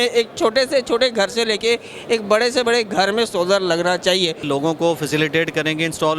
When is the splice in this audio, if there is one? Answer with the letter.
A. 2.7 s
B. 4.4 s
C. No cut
B